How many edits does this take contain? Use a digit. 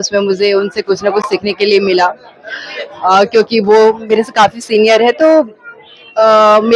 0